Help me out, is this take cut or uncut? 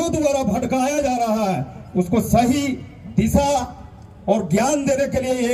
uncut